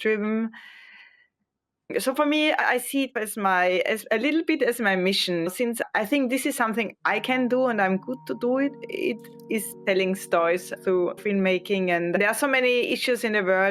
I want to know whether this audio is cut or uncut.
cut